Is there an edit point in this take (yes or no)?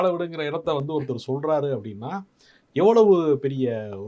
no